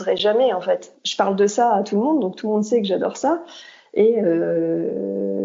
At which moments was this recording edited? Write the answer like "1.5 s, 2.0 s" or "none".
1.0 s